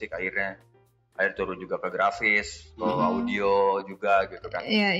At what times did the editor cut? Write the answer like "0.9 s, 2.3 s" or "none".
none